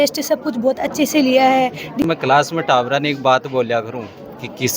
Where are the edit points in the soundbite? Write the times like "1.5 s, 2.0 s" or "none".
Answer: 2.0 s

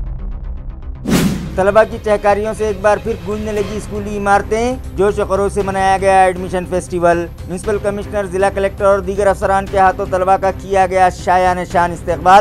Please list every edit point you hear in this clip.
1.1 s

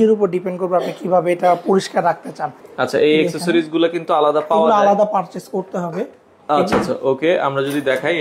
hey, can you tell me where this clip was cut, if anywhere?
2.6 s

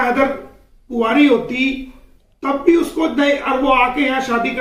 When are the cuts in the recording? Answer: none

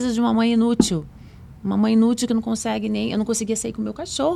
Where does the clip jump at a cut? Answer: none

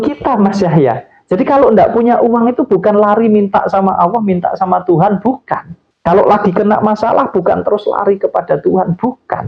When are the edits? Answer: none

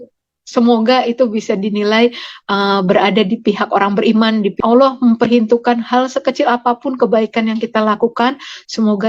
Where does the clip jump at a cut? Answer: 4.6 s

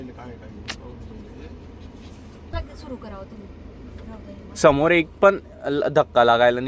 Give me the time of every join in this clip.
2.5 s

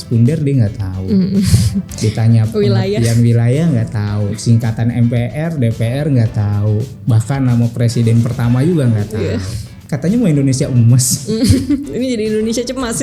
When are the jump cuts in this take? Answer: 9.8 s

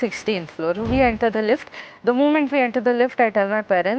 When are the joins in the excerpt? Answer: none

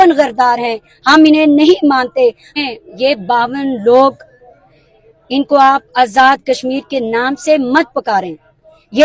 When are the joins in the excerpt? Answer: 2.5 s

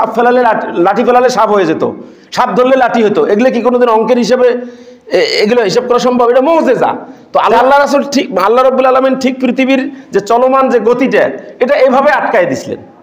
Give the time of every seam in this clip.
7.5 s

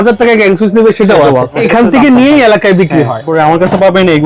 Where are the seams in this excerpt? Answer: 1.6 s, 3.3 s

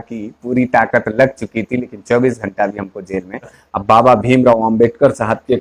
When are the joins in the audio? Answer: 3.6 s

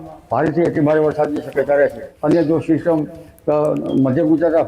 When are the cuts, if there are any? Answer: 2.1 s

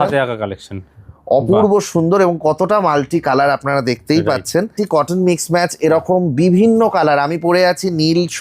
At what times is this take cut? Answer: 4.7 s

